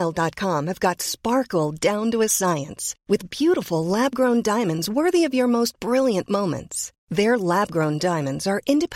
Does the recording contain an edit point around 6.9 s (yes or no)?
no